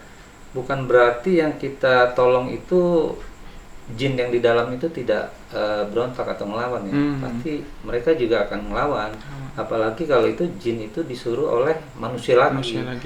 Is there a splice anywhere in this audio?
no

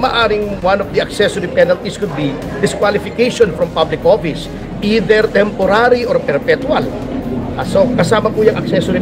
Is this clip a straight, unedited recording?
yes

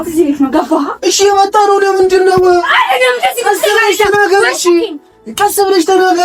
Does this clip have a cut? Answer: no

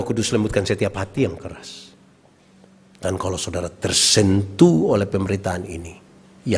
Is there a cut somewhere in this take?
no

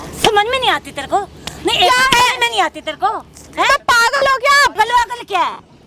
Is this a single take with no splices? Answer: yes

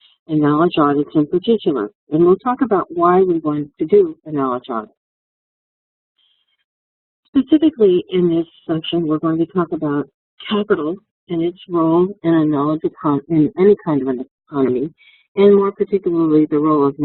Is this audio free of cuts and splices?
yes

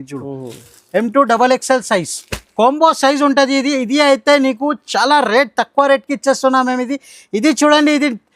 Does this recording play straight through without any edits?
yes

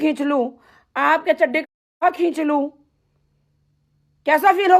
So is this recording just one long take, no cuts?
yes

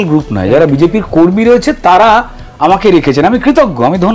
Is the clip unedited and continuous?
yes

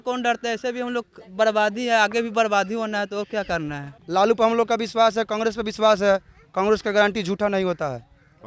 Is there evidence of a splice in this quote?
yes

